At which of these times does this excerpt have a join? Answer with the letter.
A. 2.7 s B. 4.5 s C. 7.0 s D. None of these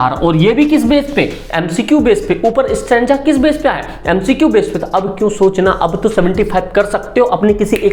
D